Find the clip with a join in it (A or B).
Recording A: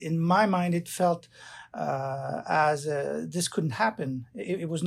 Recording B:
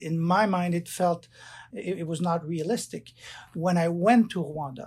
B